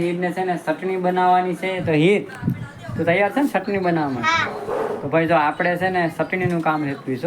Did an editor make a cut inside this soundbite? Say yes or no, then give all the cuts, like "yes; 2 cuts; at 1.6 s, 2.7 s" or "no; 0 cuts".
no; 0 cuts